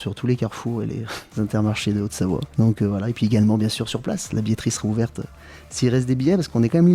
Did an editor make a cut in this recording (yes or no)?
yes